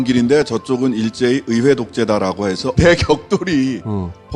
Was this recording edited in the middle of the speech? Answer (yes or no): no